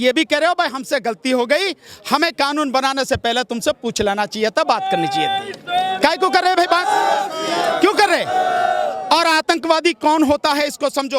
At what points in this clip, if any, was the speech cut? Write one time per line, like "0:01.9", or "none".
none